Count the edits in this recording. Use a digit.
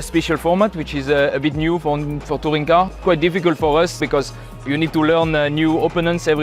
2